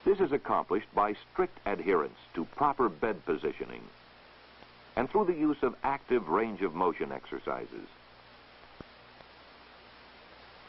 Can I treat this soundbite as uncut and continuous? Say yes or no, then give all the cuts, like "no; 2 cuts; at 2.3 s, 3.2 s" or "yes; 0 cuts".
no; 1 cut; at 9.5 s